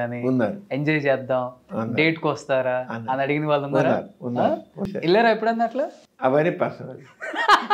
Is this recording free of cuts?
no; 2 cuts; at 4.9 s, 6.0 s

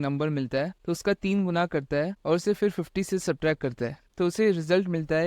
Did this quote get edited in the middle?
yes; 1 cut; at 4.0 s

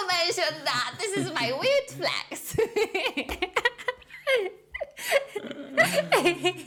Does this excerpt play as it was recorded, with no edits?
yes; 0 cuts

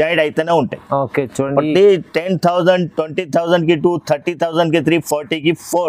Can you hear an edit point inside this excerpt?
no; 0 cuts

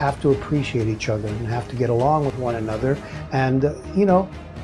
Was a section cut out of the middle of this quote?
yes; 1 cut; at 2.4 s

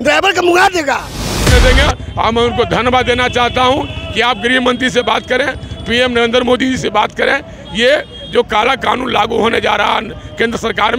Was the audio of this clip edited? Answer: yes; 1 cut; at 1.5 s

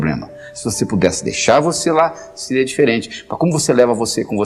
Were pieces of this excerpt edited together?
no; 0 cuts

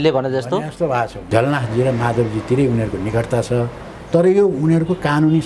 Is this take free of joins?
no; 1 cut; at 1.2 s

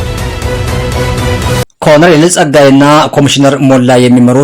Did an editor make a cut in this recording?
yes; 1 cut; at 1.6 s

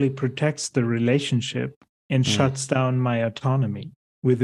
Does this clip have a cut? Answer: no; 0 cuts

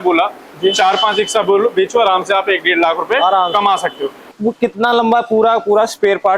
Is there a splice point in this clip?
yes; 1 cut; at 4.3 s

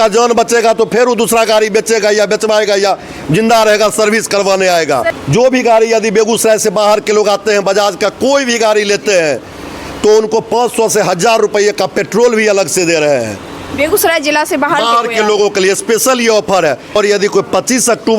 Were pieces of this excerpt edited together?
yes; 2 cuts; at 5.1 s, 17.0 s

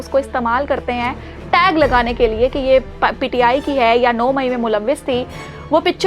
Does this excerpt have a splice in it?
no; 0 cuts

